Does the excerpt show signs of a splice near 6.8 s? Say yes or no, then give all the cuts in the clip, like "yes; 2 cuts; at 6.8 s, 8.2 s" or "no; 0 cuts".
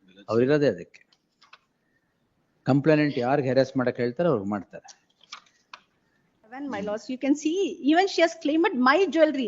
yes; 1 cut; at 6.8 s